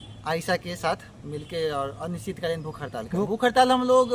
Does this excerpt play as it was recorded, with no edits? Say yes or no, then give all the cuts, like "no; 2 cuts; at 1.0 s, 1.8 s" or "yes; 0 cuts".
no; 1 cut; at 3.1 s